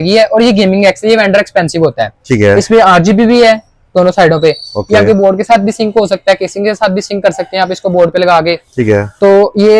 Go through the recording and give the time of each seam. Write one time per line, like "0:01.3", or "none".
none